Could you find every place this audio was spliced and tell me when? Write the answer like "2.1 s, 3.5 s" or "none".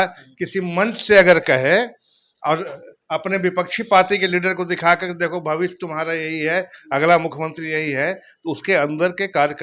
none